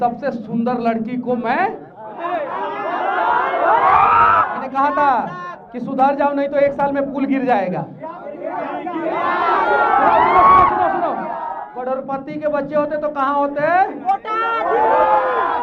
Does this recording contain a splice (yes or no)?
yes